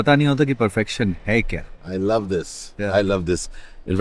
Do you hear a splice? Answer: no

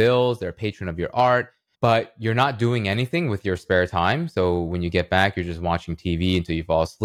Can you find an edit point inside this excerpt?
no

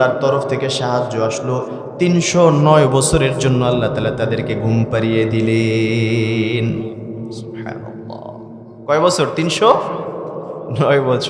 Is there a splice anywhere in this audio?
no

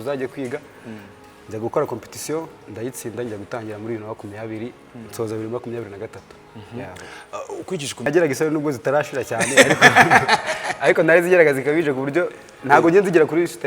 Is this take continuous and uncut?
no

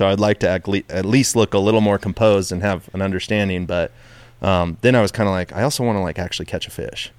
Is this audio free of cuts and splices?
yes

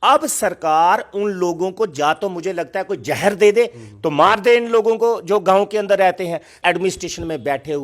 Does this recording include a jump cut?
yes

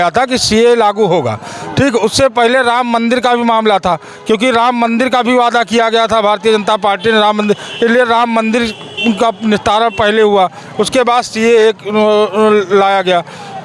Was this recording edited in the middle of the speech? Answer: no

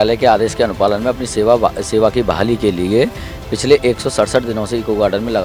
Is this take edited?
no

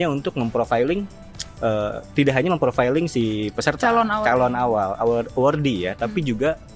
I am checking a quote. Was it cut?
no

